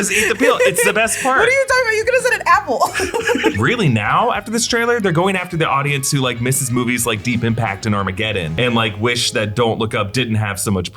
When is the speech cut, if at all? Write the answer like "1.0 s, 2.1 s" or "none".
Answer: 3.6 s, 8.5 s